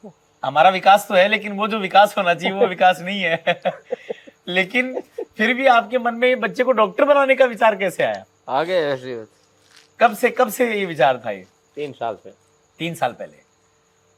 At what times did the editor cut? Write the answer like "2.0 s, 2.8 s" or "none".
none